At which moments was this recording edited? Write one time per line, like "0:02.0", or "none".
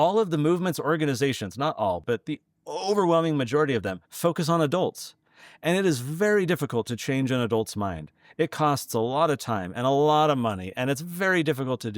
0:02.0